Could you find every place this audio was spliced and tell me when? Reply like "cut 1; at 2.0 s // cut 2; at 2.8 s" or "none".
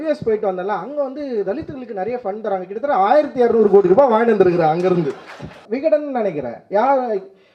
cut 1; at 5.6 s